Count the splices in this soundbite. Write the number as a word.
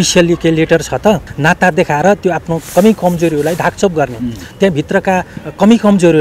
one